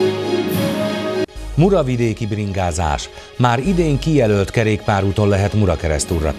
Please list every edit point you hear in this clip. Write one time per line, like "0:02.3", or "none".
0:01.1